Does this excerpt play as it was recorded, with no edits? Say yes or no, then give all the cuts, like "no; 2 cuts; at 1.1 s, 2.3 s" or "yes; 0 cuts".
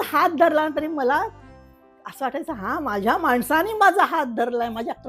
yes; 0 cuts